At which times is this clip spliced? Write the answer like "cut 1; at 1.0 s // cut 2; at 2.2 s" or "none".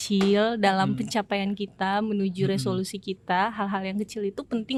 none